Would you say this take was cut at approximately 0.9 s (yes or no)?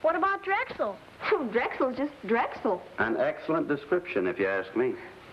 yes